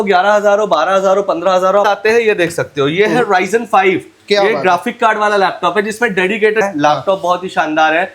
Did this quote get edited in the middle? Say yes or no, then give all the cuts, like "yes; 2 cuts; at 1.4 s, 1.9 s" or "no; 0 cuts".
yes; 2 cuts; at 1.9 s, 6.6 s